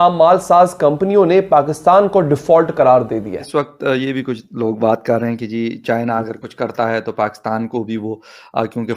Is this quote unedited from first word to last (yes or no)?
no